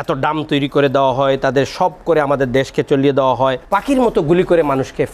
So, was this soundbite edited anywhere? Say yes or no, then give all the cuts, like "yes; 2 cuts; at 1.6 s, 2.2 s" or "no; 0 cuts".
yes; 1 cut; at 3.6 s